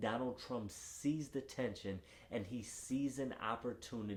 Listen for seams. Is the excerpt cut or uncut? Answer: uncut